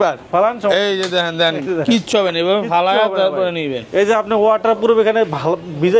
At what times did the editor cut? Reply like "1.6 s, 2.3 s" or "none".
none